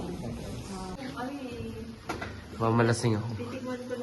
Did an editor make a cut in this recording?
yes; 1 cut; at 1.0 s

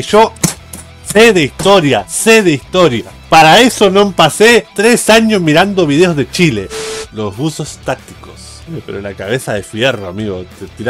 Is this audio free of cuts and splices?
no; 1 cut; at 6.9 s

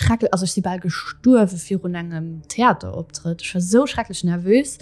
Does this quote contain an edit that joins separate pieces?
no; 0 cuts

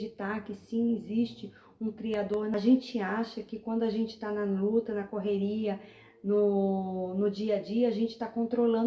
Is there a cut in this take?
yes; 1 cut; at 2.5 s

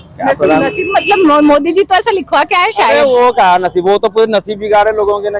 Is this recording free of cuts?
yes; 0 cuts

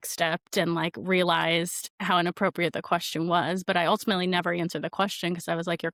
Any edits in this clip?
no; 0 cuts

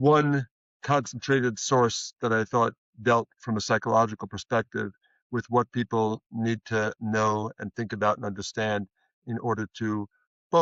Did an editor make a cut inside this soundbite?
no; 0 cuts

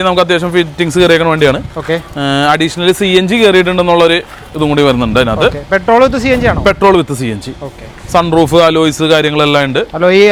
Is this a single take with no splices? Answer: yes; 0 cuts

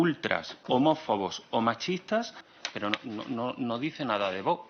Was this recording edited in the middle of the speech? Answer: yes; 1 cut; at 2.5 s

